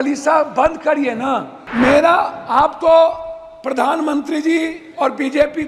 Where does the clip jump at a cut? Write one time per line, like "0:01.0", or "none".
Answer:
0:01.6